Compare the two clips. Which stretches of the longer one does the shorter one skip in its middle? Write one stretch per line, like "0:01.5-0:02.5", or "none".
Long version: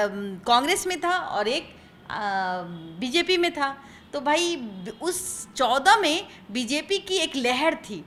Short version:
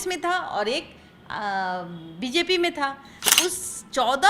0:03.9-0:04.8